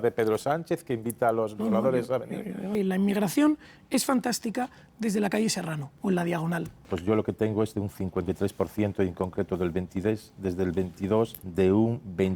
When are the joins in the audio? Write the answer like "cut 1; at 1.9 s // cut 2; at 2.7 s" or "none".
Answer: cut 1; at 2.6 s // cut 2; at 5.8 s // cut 3; at 6.9 s // cut 4; at 11.4 s